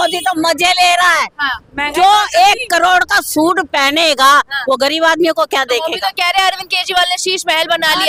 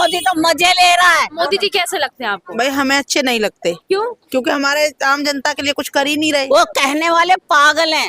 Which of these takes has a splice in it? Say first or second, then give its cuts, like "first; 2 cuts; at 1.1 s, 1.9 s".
second; 2 cuts; at 1.3 s, 6.4 s